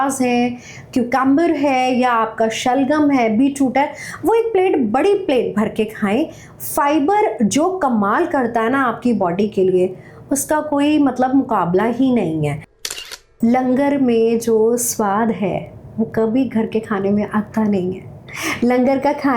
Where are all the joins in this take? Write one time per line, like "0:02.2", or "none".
0:12.8